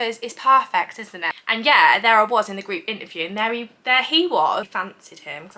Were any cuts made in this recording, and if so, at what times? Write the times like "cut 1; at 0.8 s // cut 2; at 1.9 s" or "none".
cut 1; at 1.0 s // cut 2; at 4.7 s